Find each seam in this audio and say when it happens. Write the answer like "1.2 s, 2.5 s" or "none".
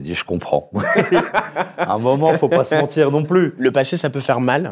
3.5 s

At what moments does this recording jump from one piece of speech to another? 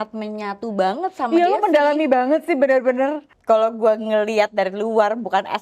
3.3 s

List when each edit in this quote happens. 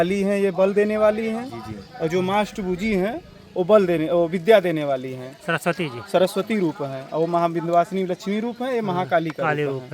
none

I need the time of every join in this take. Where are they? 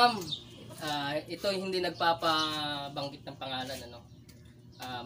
none

